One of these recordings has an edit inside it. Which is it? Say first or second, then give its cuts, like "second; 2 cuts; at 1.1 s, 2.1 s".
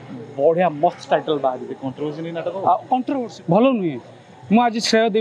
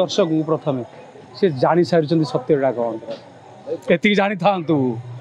first; 1 cut; at 3.2 s